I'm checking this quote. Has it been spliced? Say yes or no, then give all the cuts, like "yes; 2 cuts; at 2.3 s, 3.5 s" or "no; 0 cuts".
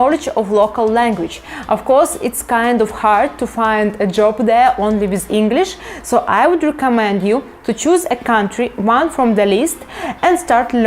no; 0 cuts